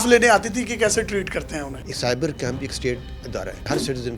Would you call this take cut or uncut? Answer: cut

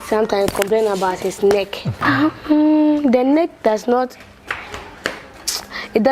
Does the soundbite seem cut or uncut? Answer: cut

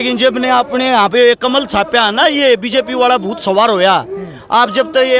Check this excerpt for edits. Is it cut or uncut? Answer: uncut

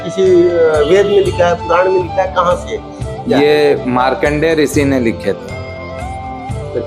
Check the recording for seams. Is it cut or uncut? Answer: uncut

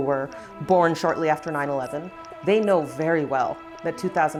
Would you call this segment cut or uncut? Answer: uncut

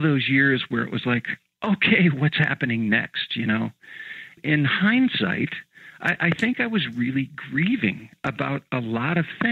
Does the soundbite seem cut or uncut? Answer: cut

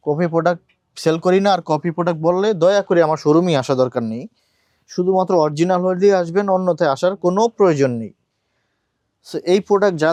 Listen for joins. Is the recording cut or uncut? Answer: uncut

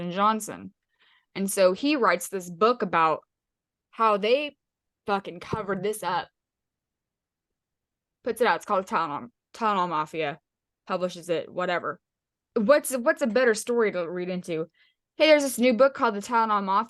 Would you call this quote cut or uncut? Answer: cut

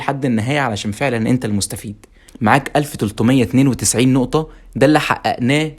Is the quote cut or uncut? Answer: cut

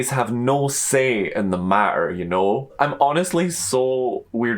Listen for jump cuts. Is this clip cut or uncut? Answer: cut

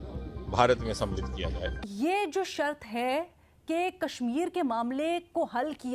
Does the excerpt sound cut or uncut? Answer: cut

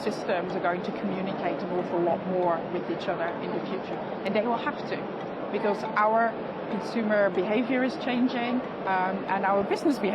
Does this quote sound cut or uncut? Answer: cut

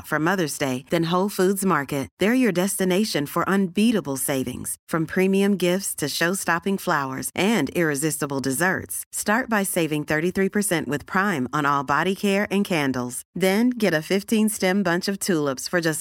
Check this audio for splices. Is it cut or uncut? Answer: uncut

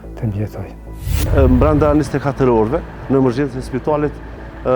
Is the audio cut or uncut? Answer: cut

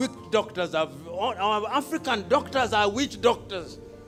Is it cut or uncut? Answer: uncut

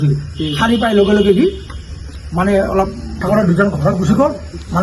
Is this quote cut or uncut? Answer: cut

